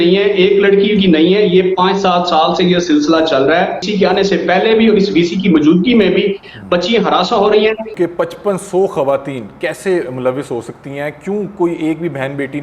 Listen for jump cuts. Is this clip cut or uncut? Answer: cut